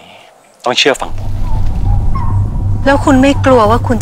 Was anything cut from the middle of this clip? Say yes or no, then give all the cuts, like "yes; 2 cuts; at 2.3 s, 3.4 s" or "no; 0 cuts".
yes; 1 cut; at 1.3 s